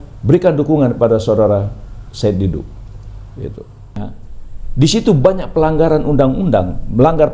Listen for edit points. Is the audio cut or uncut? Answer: cut